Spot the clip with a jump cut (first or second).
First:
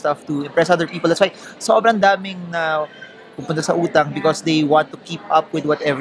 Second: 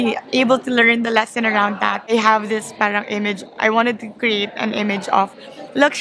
second